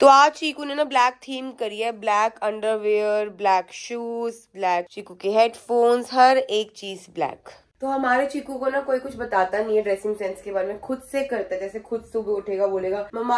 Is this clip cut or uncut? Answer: uncut